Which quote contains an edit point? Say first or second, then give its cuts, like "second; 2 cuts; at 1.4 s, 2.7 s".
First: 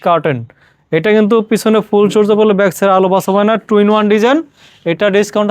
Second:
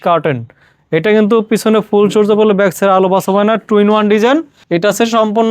second; 1 cut; at 4.6 s